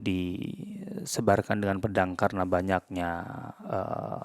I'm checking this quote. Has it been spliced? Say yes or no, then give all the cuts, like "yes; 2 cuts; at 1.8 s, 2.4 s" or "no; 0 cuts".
no; 0 cuts